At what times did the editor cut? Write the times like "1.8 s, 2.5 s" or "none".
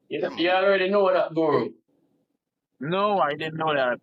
none